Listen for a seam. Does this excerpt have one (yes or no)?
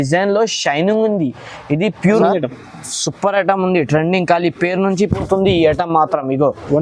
yes